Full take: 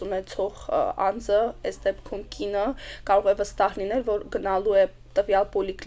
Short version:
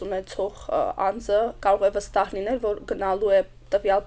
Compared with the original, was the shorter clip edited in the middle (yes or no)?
yes